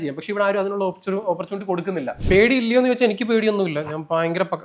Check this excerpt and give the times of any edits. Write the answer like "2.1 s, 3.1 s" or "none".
2.1 s